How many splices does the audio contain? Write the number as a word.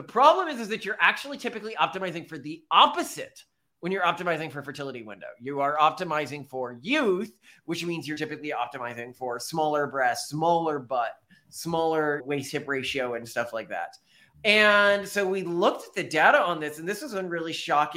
zero